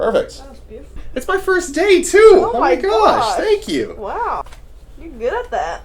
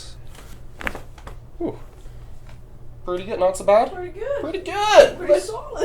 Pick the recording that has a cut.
first; 2 cuts; at 1.0 s, 4.4 s

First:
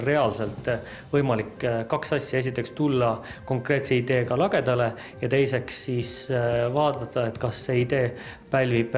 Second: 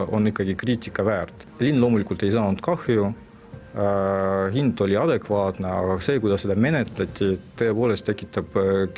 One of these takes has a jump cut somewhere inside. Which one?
second; 1 cut; at 1.4 s

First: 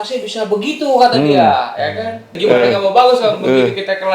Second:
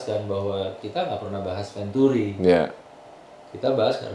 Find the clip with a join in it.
first; 1 cut; at 2.3 s

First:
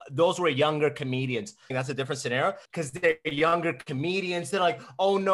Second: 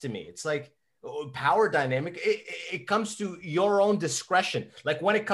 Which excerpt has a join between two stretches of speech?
first; 2 cuts; at 1.7 s, 2.6 s

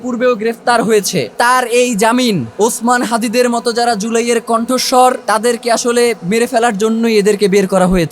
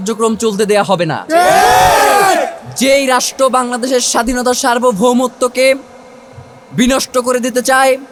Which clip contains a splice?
first; 3 cuts; at 1.3 s, 2.5 s, 5.2 s

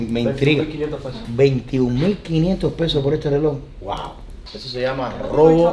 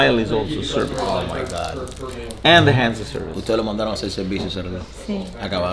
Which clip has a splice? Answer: first; 1 cut; at 1.1 s

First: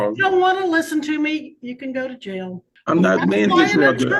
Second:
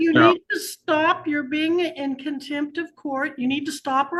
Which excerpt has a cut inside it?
first; 1 cut; at 2.7 s

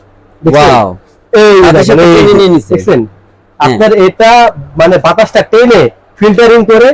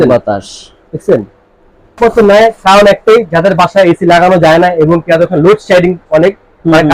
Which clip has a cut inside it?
second; 1 cut; at 2.0 s

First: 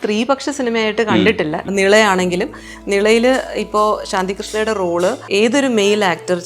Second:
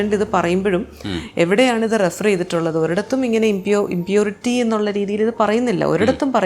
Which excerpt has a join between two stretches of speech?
first; 2 cuts; at 1.6 s, 5.2 s

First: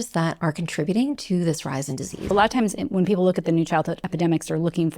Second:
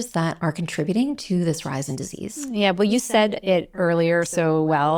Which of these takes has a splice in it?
first; 2 cuts; at 2.3 s, 4.0 s

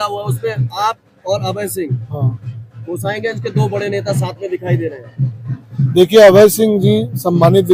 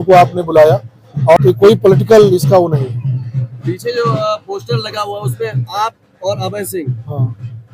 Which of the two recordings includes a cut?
second; 1 cut; at 1.4 s

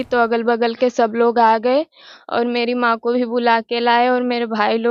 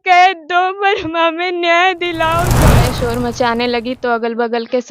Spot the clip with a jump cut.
second; 1 cut; at 2.7 s

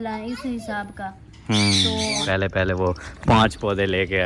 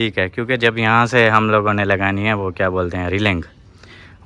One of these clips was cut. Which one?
first; 1 cut; at 2.2 s

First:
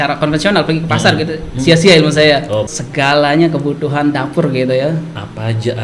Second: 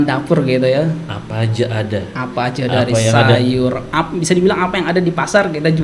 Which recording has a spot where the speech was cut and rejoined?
first; 1 cut; at 2.8 s

